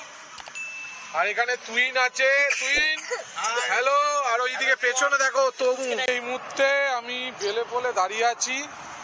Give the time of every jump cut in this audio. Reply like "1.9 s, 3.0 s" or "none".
6.0 s